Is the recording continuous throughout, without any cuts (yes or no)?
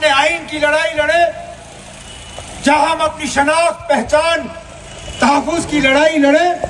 yes